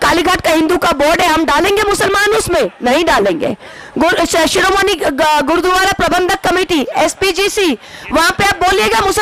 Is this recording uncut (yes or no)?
yes